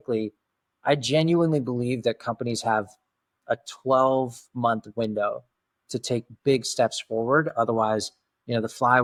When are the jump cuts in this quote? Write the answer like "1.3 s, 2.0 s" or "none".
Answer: none